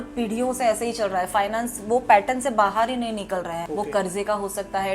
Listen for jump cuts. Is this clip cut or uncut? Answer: cut